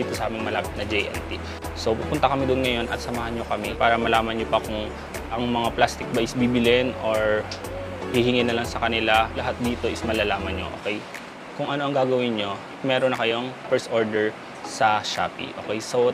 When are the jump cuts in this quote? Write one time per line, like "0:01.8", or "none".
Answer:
none